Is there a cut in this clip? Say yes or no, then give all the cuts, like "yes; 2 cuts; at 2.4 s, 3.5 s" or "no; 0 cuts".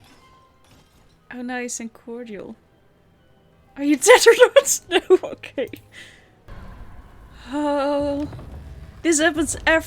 yes; 1 cut; at 6.5 s